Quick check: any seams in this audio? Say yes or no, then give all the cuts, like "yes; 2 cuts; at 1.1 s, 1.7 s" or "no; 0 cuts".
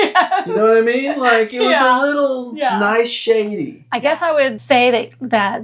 yes; 1 cut; at 3.9 s